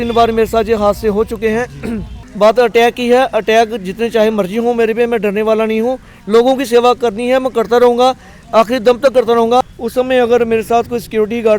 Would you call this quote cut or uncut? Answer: cut